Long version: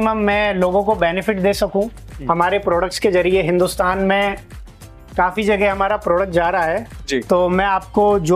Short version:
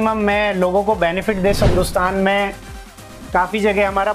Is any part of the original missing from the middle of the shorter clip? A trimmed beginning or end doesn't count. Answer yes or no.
yes